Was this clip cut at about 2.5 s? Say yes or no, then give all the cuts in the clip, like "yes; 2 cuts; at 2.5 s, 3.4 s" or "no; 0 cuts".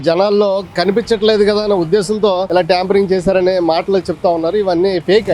yes; 1 cut; at 2.5 s